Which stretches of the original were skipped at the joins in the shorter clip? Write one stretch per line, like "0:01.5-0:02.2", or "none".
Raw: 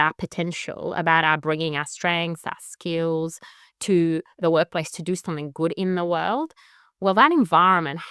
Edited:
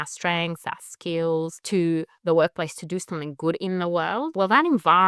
0:03.4-0:03.7
0:06.5-0:07.0